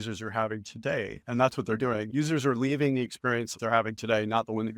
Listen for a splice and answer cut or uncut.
cut